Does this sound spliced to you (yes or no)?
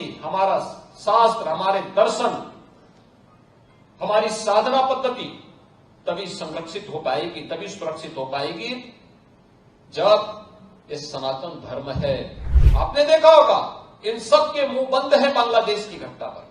yes